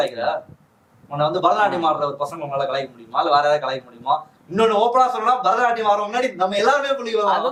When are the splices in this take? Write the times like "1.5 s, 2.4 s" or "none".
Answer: none